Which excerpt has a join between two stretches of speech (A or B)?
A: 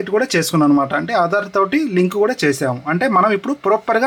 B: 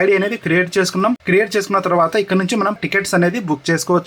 B